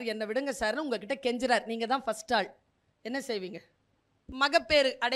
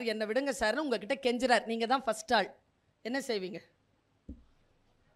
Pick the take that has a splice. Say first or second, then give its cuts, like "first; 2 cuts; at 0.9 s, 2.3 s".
first; 1 cut; at 4.2 s